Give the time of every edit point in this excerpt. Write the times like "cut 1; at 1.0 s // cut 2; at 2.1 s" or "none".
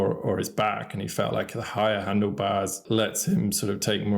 cut 1; at 2.8 s